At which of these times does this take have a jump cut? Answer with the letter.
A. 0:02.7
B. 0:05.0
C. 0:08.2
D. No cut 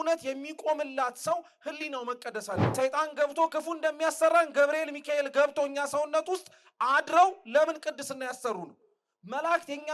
A